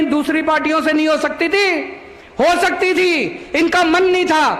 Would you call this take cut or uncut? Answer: uncut